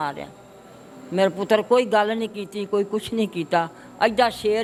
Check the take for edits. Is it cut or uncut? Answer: uncut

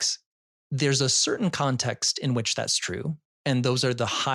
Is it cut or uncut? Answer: uncut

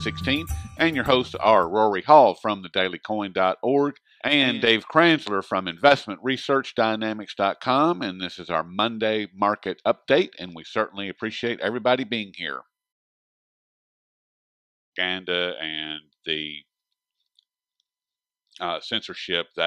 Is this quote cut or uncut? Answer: uncut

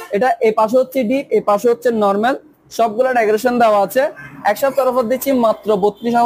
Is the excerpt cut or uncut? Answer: uncut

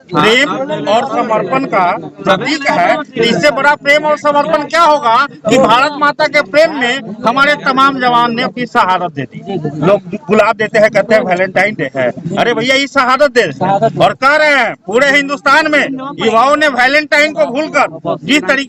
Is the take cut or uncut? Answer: uncut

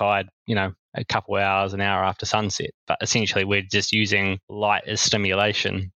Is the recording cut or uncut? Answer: cut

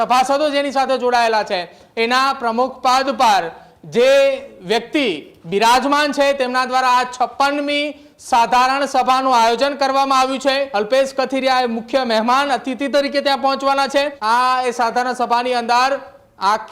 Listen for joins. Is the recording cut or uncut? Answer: cut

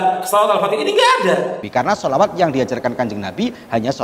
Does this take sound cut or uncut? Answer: cut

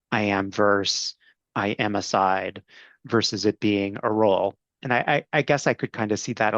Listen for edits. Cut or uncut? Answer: cut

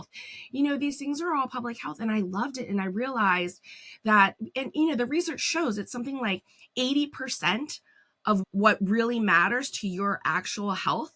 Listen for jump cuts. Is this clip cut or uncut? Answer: cut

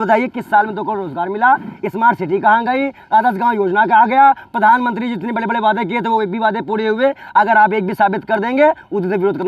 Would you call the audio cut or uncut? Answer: uncut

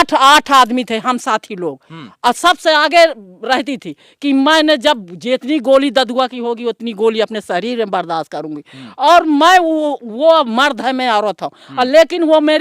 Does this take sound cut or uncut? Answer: uncut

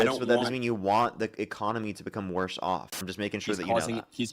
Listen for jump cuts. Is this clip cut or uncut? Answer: cut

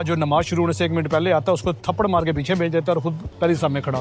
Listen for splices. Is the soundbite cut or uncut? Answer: uncut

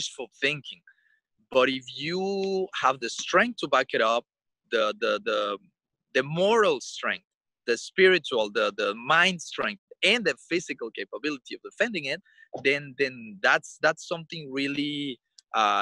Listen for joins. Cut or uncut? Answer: uncut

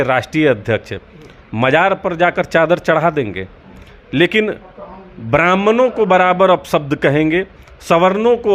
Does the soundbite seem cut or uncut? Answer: uncut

